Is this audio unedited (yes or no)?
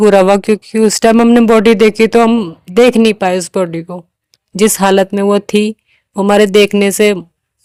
yes